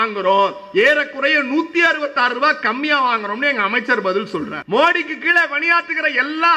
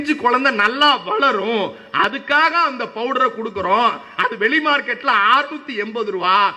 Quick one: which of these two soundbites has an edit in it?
first; 1 cut; at 4.6 s

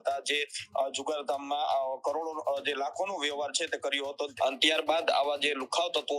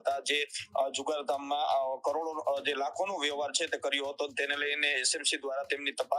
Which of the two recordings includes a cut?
first; 1 cut; at 4.3 s

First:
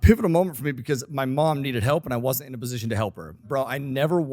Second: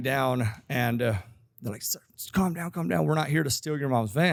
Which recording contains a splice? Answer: first; 1 cut; at 3.4 s

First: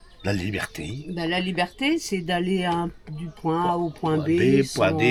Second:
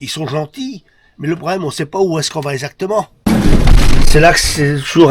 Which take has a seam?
second; 1 cut; at 3.3 s

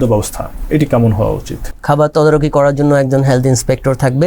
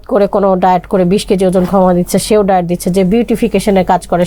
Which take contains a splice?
first; 1 cut; at 1.7 s

